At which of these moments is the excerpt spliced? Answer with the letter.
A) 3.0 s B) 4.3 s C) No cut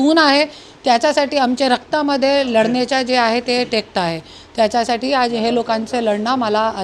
C